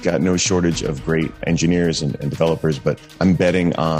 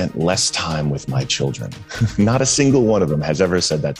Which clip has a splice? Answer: first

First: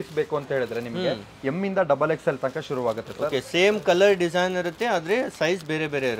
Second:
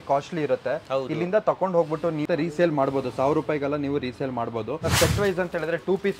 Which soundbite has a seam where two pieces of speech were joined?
second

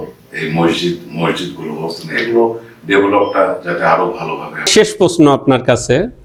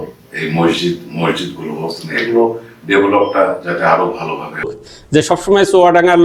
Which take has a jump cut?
second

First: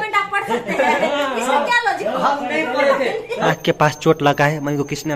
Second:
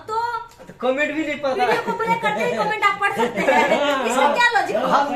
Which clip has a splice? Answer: first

